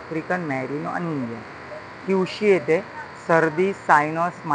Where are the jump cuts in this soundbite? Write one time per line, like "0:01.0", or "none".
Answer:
none